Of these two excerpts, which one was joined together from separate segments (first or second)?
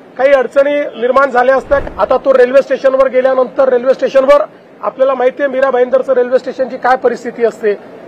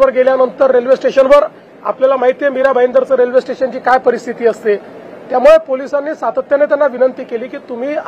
first